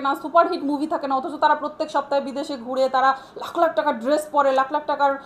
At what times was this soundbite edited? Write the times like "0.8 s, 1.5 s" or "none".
none

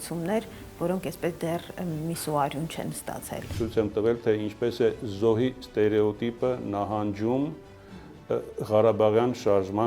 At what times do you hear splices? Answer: 3.5 s

